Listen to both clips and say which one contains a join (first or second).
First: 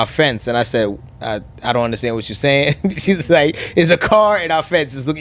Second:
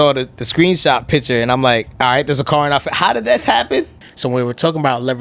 second